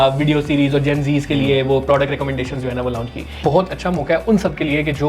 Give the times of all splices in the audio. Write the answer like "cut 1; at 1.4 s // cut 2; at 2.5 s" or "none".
cut 1; at 3.4 s